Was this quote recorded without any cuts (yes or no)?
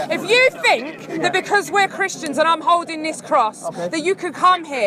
yes